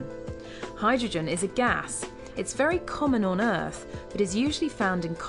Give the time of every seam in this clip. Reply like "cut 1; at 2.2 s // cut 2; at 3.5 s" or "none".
cut 1; at 2.4 s